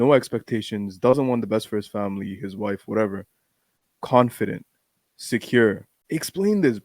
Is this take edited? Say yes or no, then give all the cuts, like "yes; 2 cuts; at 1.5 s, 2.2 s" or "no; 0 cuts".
yes; 1 cut; at 5.9 s